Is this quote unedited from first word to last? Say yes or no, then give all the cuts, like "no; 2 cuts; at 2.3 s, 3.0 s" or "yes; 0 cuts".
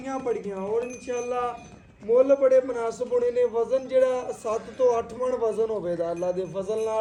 yes; 0 cuts